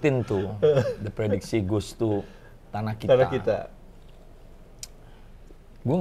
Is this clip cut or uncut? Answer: uncut